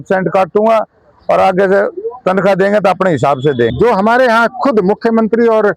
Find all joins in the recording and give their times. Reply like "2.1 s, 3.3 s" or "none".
3.7 s